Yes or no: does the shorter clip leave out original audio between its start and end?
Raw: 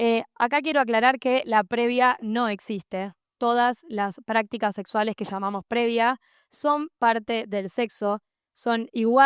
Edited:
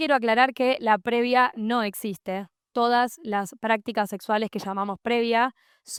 no